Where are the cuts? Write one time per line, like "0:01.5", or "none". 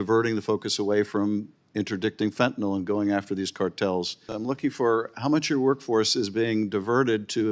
0:04.3